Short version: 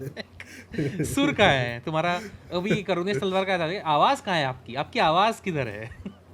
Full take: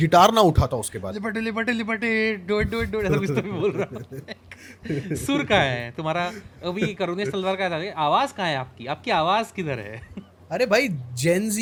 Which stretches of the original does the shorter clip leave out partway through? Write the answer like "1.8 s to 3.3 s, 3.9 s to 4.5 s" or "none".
none